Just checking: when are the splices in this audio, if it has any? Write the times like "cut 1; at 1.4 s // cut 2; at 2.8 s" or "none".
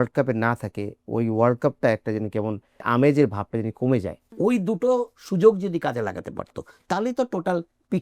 cut 1; at 2.9 s // cut 2; at 4.2 s